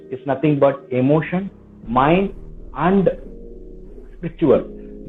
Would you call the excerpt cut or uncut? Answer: uncut